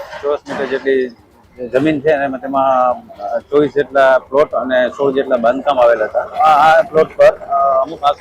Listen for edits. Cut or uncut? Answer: cut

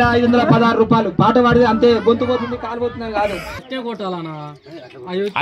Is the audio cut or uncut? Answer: cut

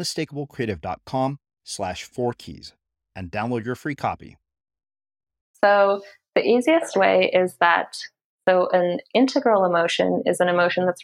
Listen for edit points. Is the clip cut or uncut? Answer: cut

